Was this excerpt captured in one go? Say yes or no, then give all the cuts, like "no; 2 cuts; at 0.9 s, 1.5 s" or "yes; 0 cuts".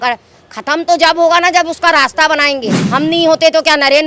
no; 1 cut; at 2.8 s